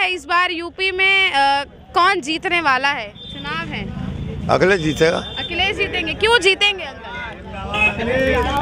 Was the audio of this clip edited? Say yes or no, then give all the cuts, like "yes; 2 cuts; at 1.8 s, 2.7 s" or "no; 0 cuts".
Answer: no; 0 cuts